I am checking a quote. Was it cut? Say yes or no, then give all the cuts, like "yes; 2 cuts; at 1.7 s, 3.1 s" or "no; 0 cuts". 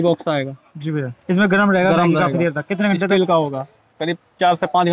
yes; 1 cut; at 1.1 s